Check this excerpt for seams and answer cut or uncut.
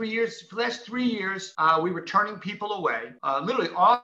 cut